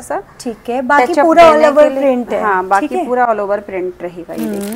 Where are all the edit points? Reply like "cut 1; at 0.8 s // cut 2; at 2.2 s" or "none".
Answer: none